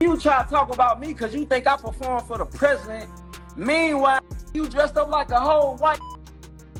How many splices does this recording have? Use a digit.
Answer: 0